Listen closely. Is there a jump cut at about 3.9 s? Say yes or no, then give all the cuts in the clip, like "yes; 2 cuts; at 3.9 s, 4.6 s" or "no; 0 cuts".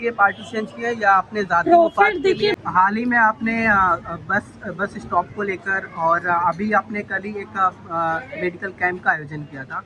no; 1 cut; at 2.6 s